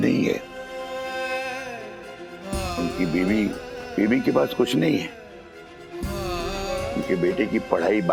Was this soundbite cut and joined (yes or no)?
no